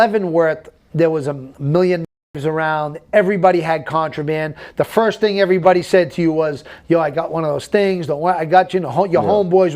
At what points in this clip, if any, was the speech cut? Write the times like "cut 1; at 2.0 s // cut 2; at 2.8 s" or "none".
cut 1; at 1.5 s